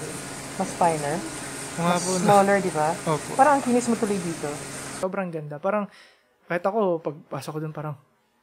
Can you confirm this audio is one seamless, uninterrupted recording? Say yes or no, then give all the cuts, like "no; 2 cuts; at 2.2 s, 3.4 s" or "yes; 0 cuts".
no; 1 cut; at 4.8 s